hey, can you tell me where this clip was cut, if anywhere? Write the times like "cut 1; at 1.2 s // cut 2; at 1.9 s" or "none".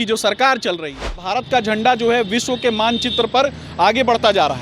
cut 1; at 1.2 s